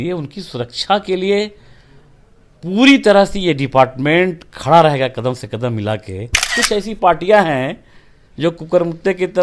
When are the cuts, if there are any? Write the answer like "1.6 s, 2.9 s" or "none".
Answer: 6.5 s